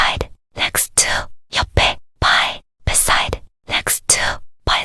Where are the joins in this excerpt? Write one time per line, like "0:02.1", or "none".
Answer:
none